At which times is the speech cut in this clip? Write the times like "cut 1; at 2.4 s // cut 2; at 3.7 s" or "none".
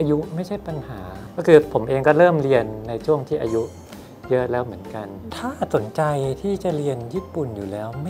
none